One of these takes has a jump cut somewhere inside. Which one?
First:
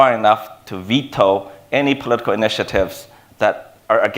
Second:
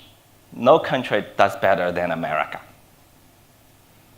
first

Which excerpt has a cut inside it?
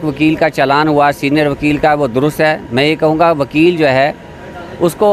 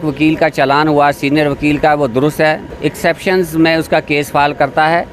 second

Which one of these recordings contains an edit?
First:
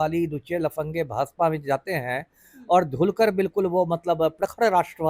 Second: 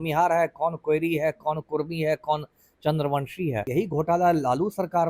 second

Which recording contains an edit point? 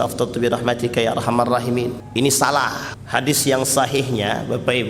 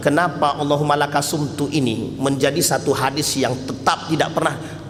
first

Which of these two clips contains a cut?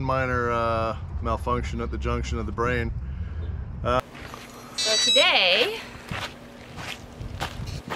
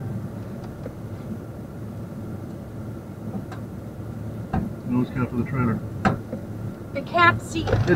first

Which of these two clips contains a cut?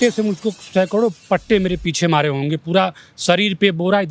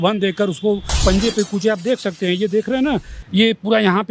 second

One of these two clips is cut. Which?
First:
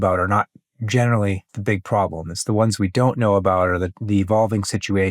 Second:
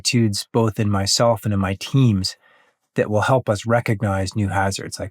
first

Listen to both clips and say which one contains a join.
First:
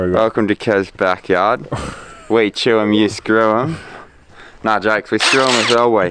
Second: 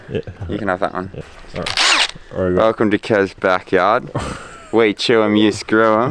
second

